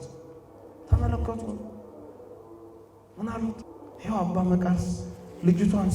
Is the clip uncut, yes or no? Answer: no